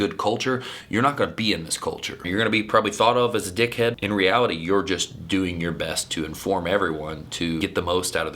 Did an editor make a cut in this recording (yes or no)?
yes